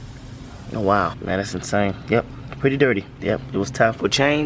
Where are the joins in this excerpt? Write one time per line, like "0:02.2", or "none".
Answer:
0:01.2
0:03.1